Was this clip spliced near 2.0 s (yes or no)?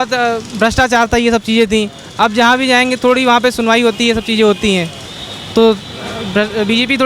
no